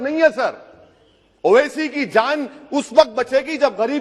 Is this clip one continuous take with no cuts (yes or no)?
yes